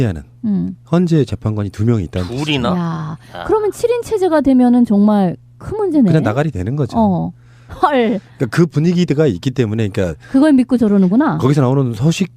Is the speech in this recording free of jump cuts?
yes; 0 cuts

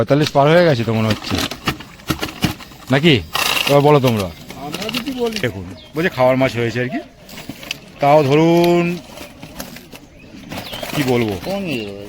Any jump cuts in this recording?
yes; 1 cut; at 5.4 s

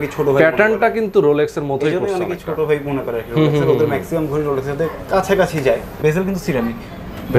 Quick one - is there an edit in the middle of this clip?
yes; 1 cut; at 5.9 s

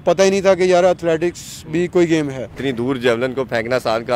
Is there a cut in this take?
yes; 1 cut; at 2.6 s

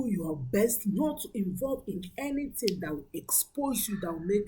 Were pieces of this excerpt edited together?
no; 0 cuts

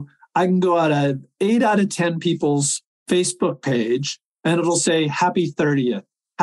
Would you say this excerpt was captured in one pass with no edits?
yes; 0 cuts

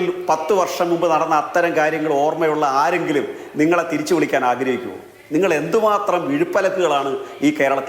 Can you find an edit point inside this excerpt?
no; 0 cuts

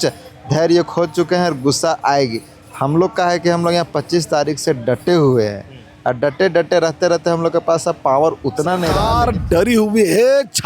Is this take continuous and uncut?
no; 1 cut; at 9.0 s

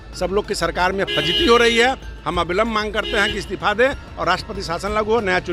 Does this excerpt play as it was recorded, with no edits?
yes; 0 cuts

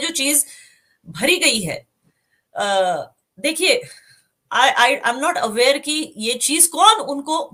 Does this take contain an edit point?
no; 0 cuts

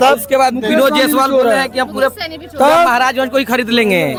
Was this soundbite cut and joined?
no; 0 cuts

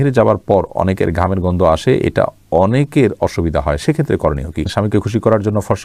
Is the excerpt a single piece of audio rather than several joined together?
no; 1 cut; at 4.7 s

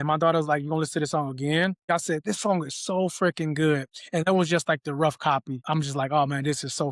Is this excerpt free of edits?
no; 2 cuts; at 1.9 s, 5.5 s

